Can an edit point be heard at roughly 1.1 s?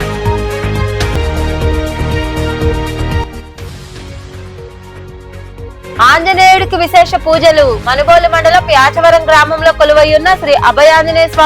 no; 0 cuts

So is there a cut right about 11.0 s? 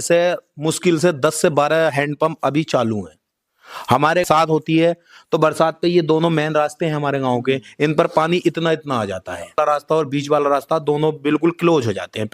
no; 2 cuts; at 4.2 s, 9.6 s

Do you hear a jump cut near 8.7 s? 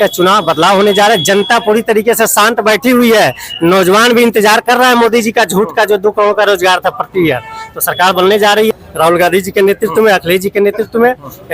yes; 1 cut; at 8.7 s

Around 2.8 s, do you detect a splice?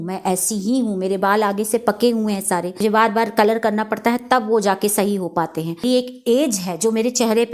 yes; 2 cuts; at 2.8 s, 5.8 s

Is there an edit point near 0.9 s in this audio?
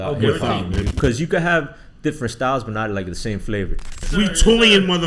yes; 2 cuts; at 0.9 s, 4.0 s

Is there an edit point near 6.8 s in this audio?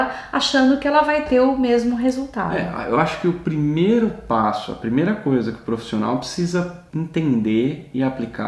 yes; 1 cut; at 6.8 s

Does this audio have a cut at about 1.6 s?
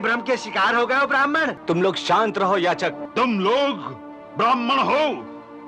yes; 2 cuts; at 1.6 s, 3.0 s

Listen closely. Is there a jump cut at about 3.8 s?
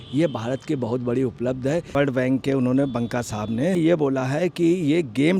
yes; 2 cuts; at 1.9 s, 3.8 s

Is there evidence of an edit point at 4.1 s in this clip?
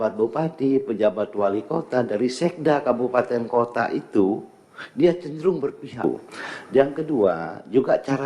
no; 1 cut; at 6.0 s

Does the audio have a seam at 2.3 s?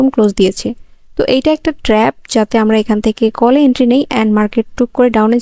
no; 0 cuts

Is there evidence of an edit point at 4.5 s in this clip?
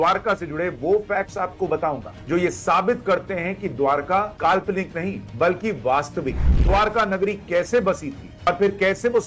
no; 0 cuts

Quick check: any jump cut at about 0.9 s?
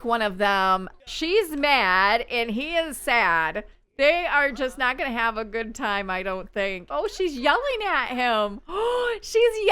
yes; 2 cuts; at 0.9 s, 6.8 s

